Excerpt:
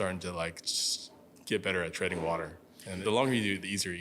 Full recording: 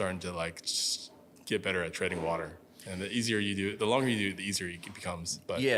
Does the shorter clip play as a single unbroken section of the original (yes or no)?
no